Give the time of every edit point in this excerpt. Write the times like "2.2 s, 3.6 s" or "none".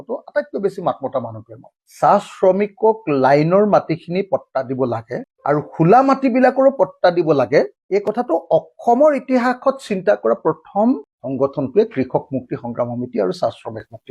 1.9 s